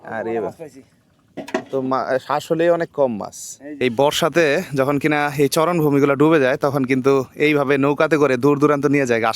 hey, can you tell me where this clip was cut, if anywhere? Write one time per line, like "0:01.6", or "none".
0:03.8